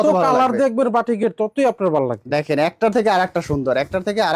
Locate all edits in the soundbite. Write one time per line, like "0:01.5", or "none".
none